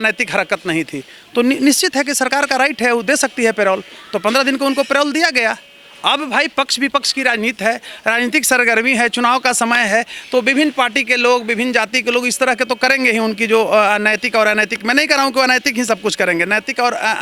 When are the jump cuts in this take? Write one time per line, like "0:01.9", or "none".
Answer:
none